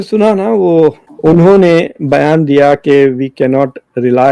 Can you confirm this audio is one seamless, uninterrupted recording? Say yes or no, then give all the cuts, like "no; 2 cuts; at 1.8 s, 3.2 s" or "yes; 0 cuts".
no; 1 cut; at 1.1 s